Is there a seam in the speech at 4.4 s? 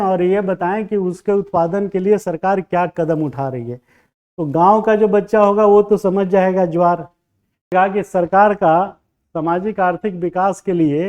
no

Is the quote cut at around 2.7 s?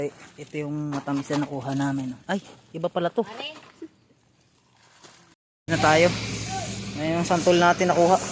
no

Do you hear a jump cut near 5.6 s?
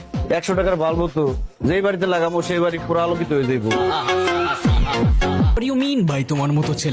yes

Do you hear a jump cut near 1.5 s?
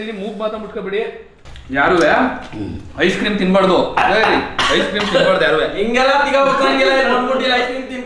yes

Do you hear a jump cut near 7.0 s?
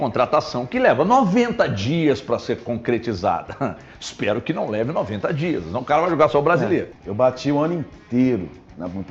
yes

